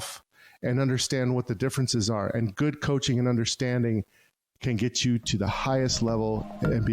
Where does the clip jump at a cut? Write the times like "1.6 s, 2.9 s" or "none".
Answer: none